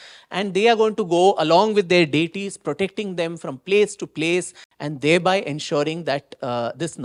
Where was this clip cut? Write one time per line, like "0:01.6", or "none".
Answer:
none